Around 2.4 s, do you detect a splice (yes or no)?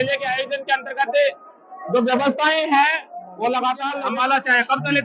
no